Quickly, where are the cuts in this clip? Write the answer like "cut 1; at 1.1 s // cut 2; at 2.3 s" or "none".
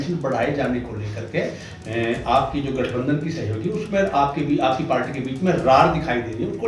none